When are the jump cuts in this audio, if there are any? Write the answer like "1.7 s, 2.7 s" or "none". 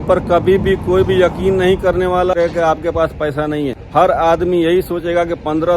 2.3 s, 3.8 s

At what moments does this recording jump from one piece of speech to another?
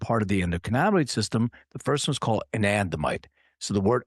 none

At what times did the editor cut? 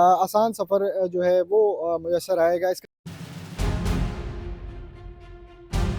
2.8 s

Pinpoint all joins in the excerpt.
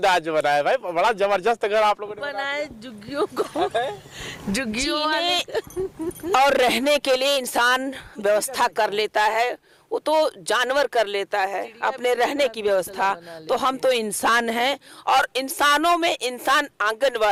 none

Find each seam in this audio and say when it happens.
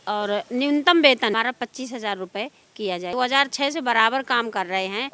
3.1 s

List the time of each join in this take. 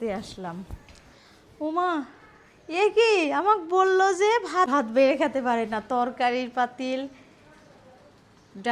4.7 s

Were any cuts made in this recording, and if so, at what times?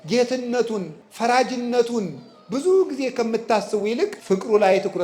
1.0 s, 4.2 s

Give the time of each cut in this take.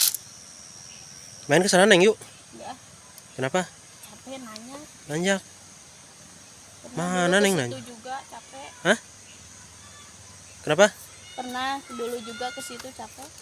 none

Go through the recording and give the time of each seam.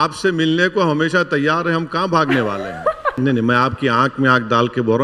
3.1 s

